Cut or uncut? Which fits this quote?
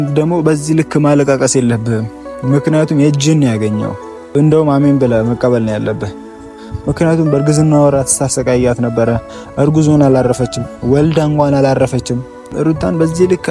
cut